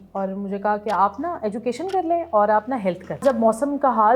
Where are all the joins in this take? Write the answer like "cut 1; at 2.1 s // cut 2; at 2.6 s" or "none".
cut 1; at 3.2 s